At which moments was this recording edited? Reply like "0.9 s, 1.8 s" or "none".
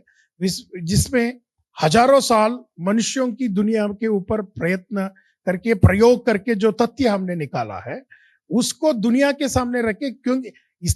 none